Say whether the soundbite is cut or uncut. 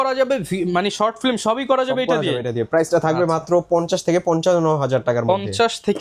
uncut